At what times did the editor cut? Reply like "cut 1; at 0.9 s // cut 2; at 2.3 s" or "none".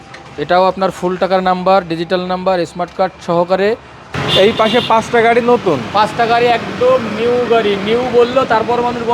cut 1; at 4.1 s